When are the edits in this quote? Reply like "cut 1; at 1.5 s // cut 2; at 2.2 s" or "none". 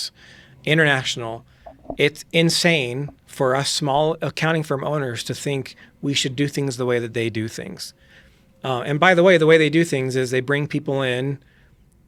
none